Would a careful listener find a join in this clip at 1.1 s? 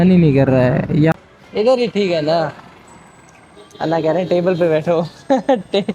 yes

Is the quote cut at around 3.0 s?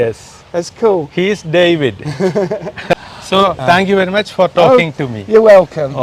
yes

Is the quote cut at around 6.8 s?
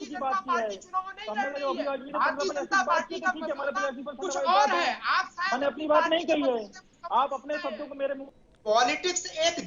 no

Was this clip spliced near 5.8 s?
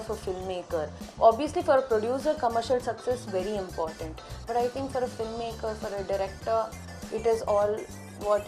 no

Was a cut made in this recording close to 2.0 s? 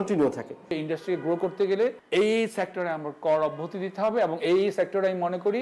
yes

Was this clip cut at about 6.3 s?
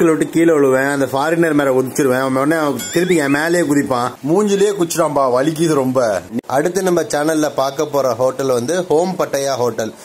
yes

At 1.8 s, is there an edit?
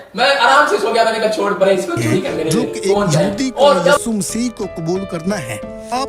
no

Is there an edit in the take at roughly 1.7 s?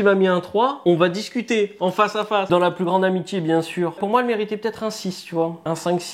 no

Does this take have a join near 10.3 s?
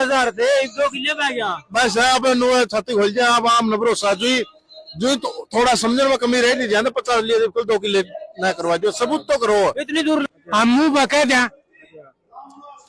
yes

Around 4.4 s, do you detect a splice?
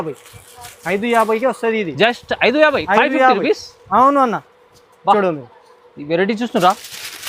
no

